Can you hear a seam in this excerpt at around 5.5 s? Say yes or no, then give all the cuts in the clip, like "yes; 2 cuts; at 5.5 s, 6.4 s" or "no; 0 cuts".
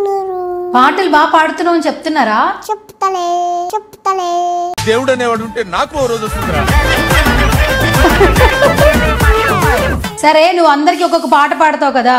no; 1 cut; at 9.8 s